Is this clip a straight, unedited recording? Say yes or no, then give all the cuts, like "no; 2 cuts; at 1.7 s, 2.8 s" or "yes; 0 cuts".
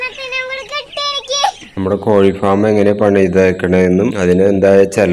no; 1 cut; at 1.6 s